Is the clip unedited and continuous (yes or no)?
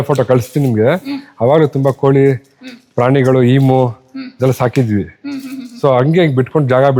yes